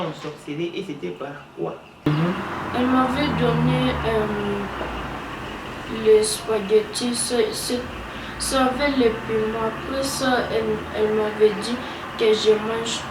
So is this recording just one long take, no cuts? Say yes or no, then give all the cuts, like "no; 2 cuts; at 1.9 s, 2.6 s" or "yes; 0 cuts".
no; 1 cut; at 2.1 s